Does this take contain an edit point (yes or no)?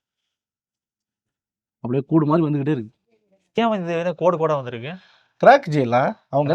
yes